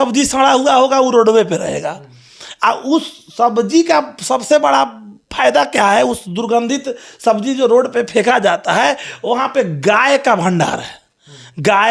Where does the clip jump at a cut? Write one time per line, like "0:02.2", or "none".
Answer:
none